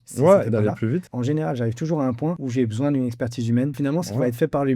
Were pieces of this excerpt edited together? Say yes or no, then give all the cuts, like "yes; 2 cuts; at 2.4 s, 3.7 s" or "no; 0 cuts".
yes; 3 cuts; at 1.1 s, 2.4 s, 3.8 s